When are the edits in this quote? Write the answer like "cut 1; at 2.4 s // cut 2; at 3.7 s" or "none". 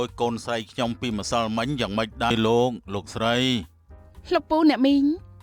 cut 1; at 2.3 s

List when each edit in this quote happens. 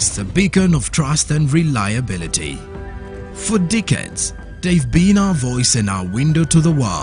none

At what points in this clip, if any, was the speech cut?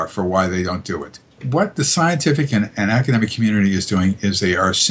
cut 1; at 1.3 s

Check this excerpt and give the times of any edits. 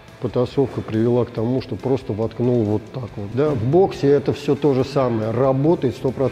cut 1; at 3.3 s

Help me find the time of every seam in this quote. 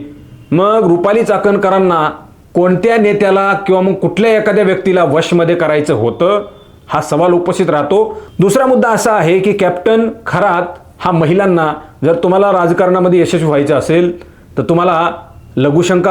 cut 1; at 8.2 s

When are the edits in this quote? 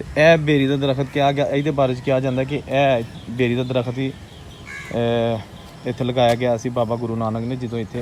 none

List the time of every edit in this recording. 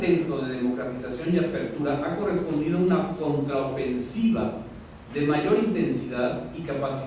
cut 1; at 1.2 s

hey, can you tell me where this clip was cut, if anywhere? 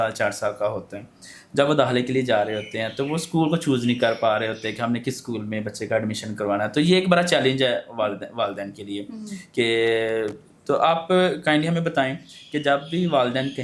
none

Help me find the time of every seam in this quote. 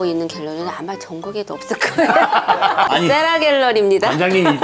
cut 1; at 2.9 s

